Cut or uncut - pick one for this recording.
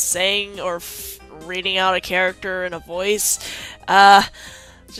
uncut